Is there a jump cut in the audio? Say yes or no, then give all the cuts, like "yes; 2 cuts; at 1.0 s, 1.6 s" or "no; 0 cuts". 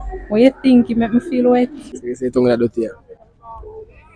yes; 1 cut; at 2.1 s